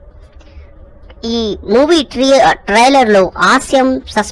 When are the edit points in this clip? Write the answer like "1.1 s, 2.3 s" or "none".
2.9 s